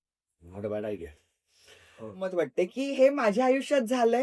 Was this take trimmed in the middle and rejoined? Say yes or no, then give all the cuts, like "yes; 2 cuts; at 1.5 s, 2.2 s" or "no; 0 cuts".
yes; 1 cut; at 2.3 s